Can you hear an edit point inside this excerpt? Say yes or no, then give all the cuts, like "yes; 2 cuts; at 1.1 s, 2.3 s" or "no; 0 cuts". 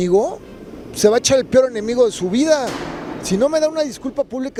no; 0 cuts